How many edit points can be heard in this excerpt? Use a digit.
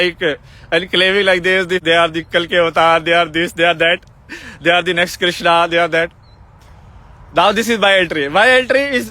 1